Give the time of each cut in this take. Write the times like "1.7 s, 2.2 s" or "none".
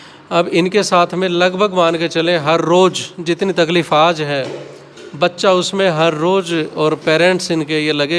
none